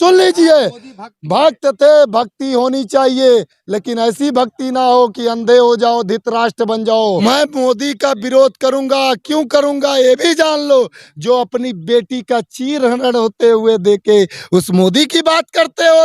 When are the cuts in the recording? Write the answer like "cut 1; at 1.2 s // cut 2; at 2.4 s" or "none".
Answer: cut 1; at 7.2 s

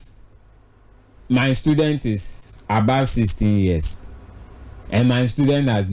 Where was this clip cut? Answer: none

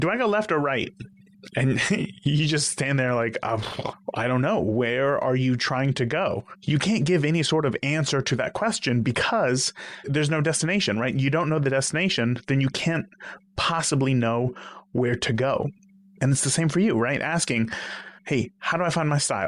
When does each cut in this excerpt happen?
cut 1; at 3.9 s // cut 2; at 6.5 s

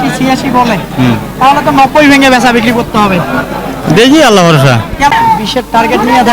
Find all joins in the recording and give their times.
cut 1; at 5.1 s

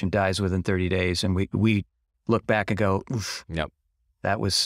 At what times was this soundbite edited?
none

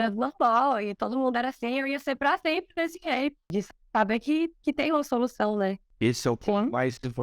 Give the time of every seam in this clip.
cut 1; at 3.5 s // cut 2; at 5.9 s

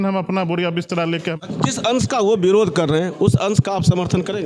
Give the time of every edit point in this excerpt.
cut 1; at 1.4 s

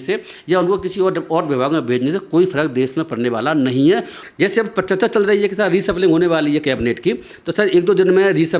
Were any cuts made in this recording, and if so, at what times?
cut 1; at 4.2 s

